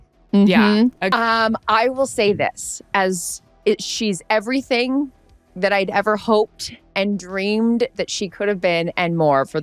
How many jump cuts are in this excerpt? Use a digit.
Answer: 1